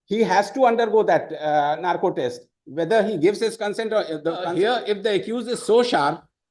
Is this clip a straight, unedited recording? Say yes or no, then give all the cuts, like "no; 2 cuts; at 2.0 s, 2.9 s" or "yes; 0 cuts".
no; 1 cut; at 4.5 s